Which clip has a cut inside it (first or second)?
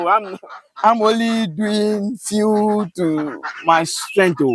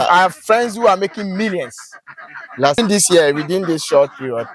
second